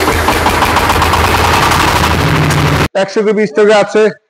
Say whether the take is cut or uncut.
cut